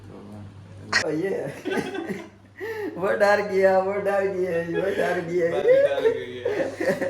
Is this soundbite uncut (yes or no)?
no